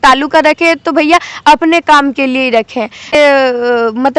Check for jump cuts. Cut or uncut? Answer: cut